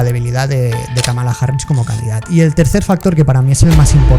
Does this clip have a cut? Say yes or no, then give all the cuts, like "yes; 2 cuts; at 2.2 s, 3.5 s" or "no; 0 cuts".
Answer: yes; 1 cut; at 2.3 s